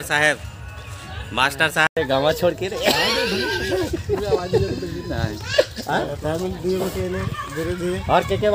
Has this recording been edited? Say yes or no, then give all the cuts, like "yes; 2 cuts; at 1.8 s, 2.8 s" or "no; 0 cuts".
yes; 1 cut; at 2.0 s